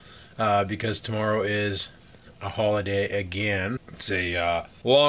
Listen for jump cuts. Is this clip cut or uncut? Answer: cut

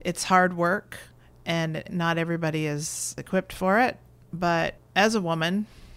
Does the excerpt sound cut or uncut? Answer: cut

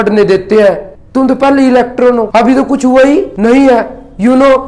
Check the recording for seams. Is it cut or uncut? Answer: cut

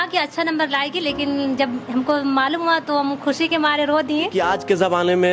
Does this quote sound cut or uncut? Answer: cut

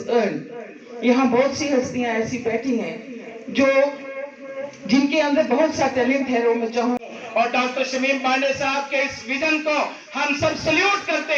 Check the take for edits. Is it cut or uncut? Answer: cut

